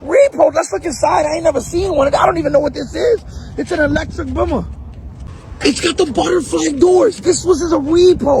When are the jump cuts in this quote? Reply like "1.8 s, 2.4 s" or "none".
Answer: none